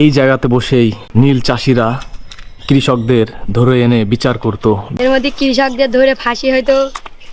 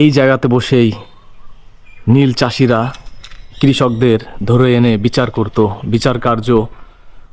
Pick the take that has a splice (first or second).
first